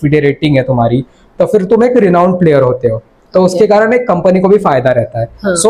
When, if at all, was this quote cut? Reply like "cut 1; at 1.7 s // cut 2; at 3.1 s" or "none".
none